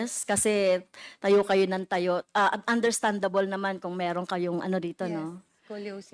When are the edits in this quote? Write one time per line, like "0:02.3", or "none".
none